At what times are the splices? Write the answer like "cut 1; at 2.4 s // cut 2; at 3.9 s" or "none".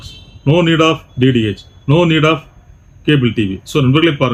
none